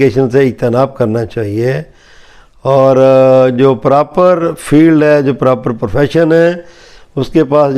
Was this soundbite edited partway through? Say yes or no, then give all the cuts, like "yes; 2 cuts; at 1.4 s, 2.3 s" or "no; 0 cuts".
no; 0 cuts